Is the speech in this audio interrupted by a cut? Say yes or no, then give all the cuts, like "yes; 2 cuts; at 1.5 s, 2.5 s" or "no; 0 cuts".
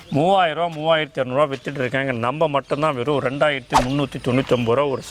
no; 0 cuts